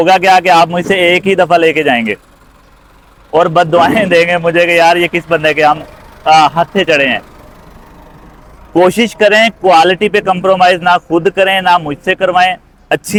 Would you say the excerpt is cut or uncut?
uncut